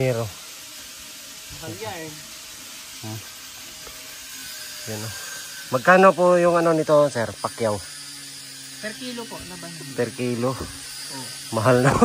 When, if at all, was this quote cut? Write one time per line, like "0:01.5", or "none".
none